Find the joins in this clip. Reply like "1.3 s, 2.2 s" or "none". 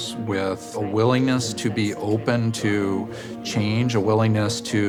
none